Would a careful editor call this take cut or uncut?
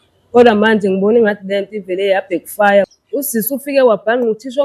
cut